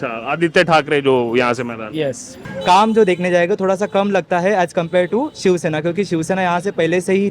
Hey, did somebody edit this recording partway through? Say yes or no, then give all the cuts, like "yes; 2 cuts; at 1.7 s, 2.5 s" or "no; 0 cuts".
yes; 1 cut; at 2.4 s